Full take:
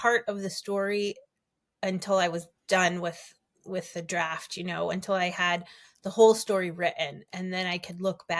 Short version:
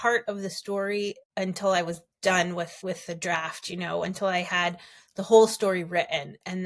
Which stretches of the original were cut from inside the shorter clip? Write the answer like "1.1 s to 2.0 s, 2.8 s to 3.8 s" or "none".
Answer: 1.2 s to 1.7 s, 3.2 s to 3.6 s